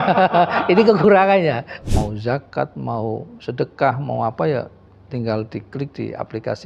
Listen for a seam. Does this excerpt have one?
yes; 1 cut; at 1.8 s

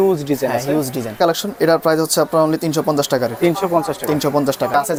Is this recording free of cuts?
yes; 0 cuts

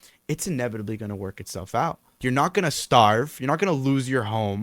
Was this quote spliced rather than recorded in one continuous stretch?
yes; 1 cut; at 2.1 s

